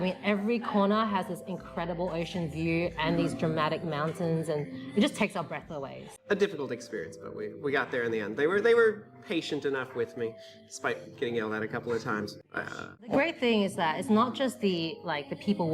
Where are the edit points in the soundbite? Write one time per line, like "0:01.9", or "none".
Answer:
0:06.1
0:13.1